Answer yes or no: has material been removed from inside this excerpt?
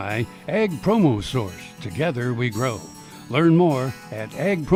no